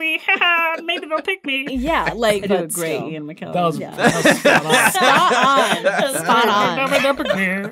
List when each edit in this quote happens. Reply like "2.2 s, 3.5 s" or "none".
2.4 s